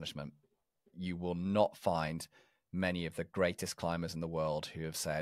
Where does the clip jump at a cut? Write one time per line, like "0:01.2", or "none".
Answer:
0:00.9